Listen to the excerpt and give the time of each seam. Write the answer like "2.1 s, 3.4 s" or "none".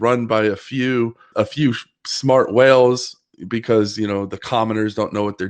1.3 s